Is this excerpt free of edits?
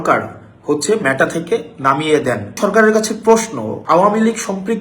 no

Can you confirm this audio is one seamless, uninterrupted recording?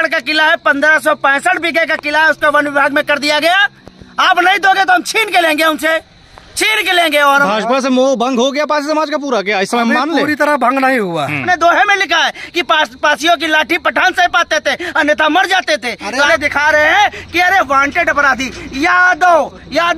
no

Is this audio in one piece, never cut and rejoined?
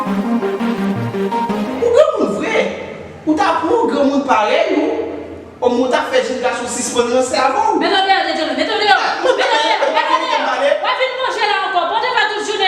no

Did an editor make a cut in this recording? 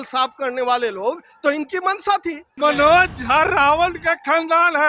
yes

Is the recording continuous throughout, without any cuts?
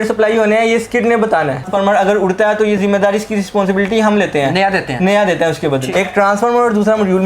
no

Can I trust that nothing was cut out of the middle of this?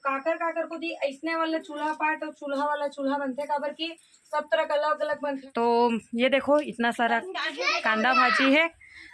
no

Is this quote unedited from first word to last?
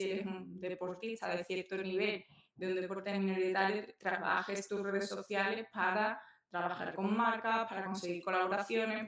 yes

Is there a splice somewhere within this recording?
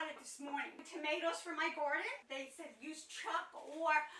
yes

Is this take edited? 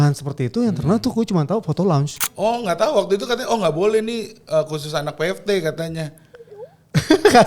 yes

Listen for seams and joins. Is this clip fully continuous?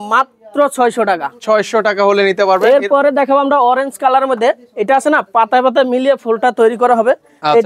yes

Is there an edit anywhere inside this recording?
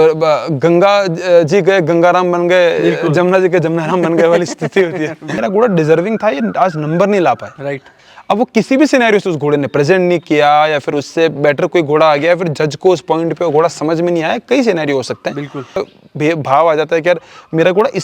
yes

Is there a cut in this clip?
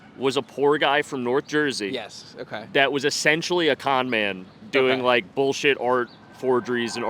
no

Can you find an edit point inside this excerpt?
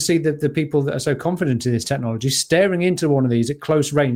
no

